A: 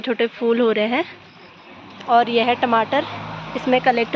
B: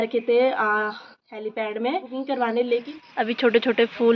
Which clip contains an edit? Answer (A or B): B